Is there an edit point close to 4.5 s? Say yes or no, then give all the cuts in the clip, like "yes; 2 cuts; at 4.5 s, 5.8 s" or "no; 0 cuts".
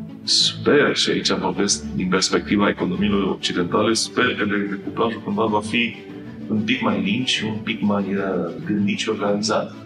no; 2 cuts; at 6.5 s, 8.6 s